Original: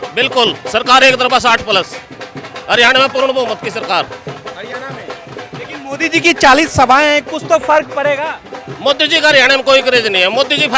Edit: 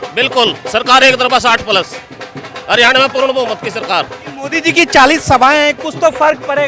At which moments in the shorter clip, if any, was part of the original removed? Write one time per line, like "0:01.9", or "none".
0:04.2